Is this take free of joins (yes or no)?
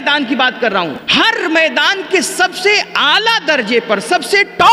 no